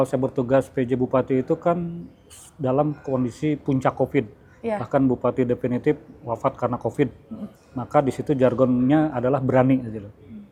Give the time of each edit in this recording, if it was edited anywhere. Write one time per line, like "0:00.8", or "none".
none